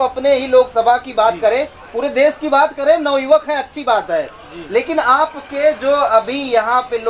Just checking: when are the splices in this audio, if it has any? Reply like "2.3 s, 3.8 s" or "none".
none